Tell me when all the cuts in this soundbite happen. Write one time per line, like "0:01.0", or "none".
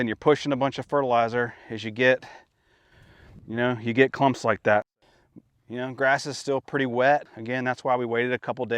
0:04.9
0:07.4